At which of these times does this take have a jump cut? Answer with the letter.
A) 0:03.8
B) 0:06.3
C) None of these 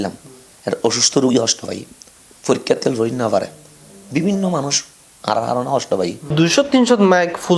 B